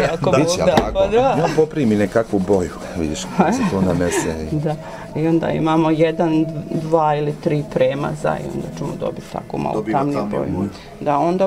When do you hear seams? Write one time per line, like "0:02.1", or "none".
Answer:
0:01.5